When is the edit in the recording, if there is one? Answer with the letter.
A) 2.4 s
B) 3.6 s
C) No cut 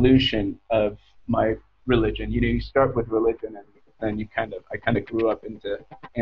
C